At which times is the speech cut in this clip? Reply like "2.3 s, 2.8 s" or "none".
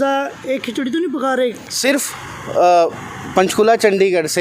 1.7 s